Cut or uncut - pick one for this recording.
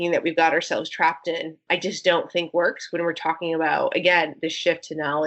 uncut